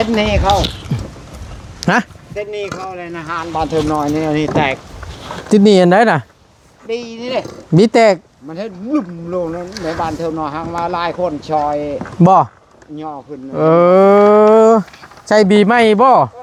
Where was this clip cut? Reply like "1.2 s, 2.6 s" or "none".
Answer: none